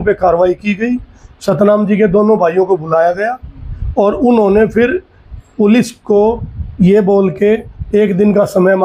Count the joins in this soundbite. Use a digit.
0